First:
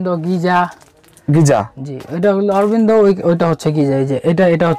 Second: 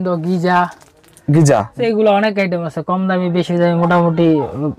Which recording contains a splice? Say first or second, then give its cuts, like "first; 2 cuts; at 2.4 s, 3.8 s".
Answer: second; 1 cut; at 1.8 s